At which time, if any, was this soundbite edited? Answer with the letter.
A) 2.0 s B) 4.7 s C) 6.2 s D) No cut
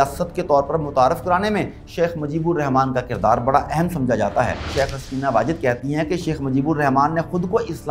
B